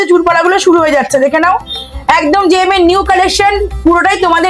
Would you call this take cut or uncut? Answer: uncut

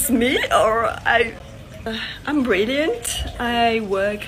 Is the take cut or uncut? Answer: cut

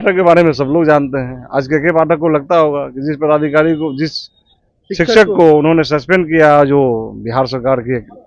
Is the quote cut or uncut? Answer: uncut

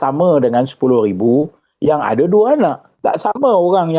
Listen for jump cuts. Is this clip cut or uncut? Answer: cut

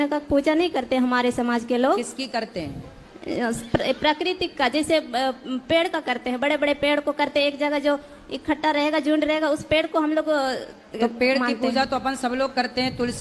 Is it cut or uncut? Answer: uncut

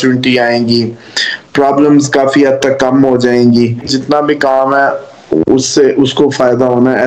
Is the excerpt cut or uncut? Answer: cut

